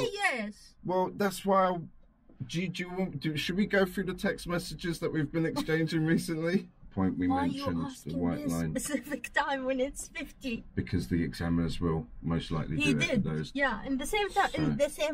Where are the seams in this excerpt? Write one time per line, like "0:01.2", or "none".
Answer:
0:06.9